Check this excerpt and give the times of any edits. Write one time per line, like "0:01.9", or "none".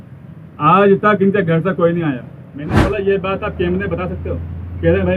0:02.8